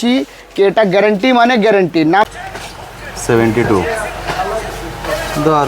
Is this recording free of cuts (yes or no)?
no